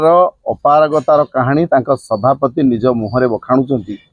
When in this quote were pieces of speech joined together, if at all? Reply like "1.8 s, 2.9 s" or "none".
none